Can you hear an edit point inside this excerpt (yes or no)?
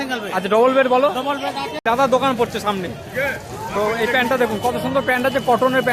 yes